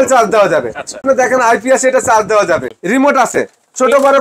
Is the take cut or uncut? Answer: cut